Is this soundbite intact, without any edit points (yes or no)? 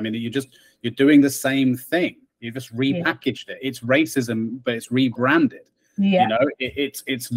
yes